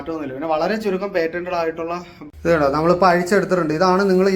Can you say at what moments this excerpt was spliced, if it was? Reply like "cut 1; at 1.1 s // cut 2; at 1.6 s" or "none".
cut 1; at 2.2 s